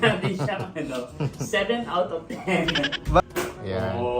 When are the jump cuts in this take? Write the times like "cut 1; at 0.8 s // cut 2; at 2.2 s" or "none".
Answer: cut 1; at 3.2 s